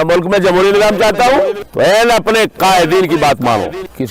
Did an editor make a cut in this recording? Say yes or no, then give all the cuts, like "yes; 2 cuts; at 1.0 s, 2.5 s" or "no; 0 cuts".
no; 0 cuts